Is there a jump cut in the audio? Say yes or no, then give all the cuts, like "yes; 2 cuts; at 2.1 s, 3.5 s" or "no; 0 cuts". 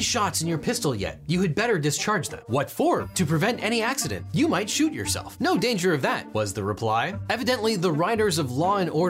yes; 3 cuts; at 3.1 s, 4.2 s, 6.2 s